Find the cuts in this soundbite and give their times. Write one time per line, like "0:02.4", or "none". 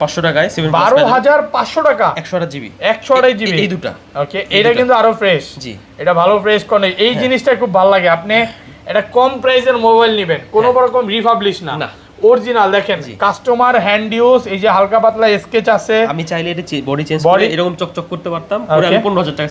none